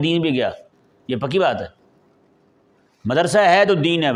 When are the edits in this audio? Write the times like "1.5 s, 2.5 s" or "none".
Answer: none

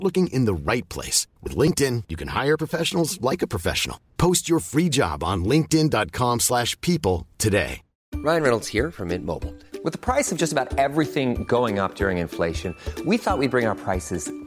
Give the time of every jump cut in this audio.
8.1 s

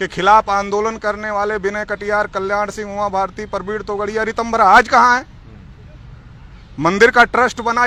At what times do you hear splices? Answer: none

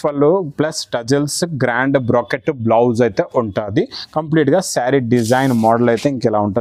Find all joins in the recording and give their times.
none

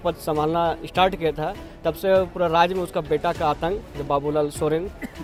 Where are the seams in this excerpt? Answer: none

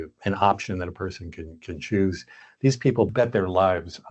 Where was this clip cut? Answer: 3.1 s

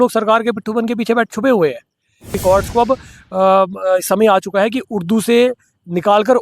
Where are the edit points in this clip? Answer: 2.4 s

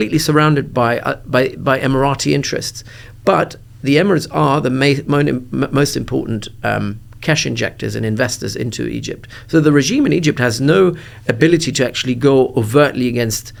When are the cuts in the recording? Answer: none

